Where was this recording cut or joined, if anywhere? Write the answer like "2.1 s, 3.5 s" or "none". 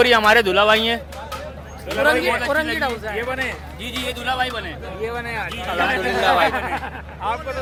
none